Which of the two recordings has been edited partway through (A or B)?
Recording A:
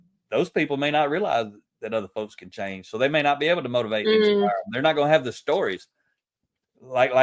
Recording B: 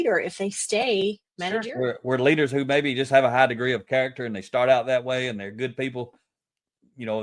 B